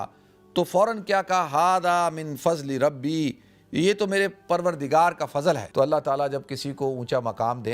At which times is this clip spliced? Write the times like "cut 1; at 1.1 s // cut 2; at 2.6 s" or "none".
cut 1; at 5.6 s